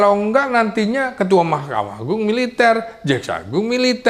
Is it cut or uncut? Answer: uncut